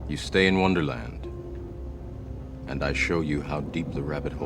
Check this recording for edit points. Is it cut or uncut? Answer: uncut